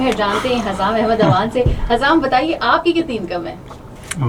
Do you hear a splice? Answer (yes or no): no